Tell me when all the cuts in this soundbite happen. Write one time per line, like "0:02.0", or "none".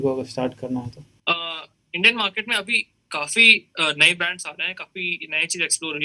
0:01.0